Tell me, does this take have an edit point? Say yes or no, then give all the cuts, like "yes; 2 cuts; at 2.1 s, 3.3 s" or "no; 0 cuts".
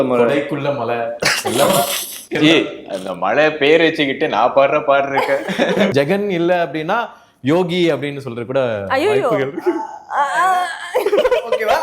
yes; 1 cut; at 5.9 s